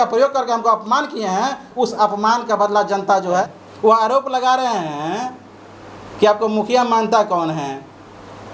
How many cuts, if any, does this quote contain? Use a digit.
1